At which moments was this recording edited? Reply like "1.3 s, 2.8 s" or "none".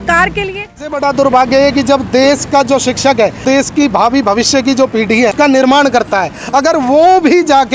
0.9 s, 3.4 s, 5.3 s